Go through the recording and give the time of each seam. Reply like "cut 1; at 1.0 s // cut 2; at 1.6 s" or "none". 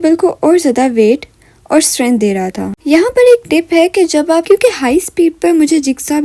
cut 1; at 2.7 s // cut 2; at 4.4 s